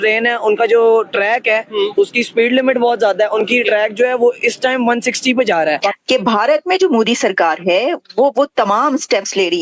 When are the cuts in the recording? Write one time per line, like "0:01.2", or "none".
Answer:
0:05.8